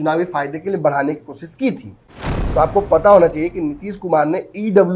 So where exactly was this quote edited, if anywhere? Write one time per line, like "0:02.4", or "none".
0:02.1